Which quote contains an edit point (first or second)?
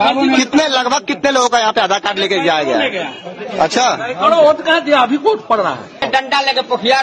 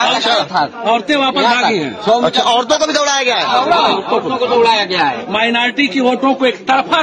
first